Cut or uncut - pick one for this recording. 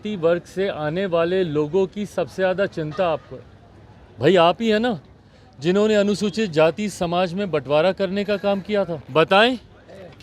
cut